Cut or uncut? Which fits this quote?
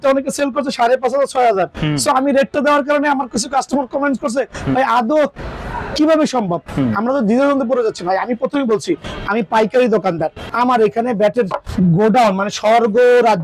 cut